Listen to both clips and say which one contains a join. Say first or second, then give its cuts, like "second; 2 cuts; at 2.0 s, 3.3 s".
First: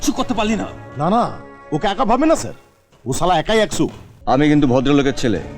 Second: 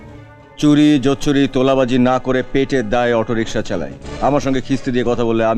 first; 1 cut; at 4.1 s